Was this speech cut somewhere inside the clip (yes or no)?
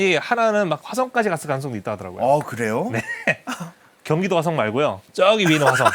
no